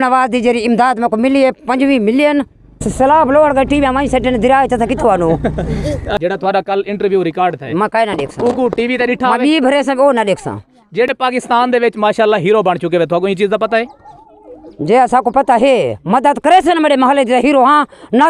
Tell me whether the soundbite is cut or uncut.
cut